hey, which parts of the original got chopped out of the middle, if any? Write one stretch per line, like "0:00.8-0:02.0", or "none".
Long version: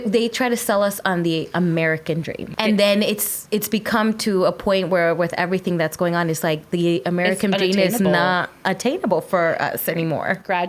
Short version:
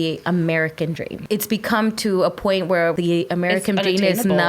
0:02.4-0:03.3
0:05.2-0:06.7